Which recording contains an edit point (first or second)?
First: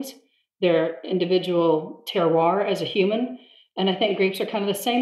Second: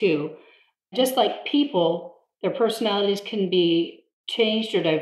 second